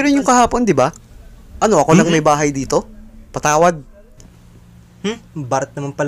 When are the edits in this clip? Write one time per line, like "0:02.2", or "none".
none